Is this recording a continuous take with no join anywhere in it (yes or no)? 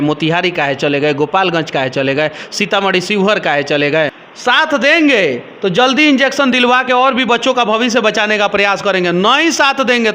no